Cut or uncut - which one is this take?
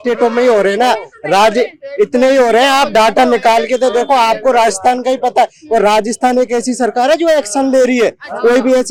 uncut